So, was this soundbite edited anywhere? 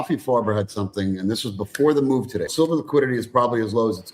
yes; 1 cut; at 2.5 s

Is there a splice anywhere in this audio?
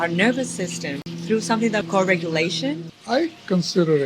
yes; 3 cuts; at 1.1 s, 1.8 s, 2.9 s

